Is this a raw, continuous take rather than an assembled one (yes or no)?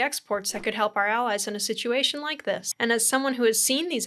no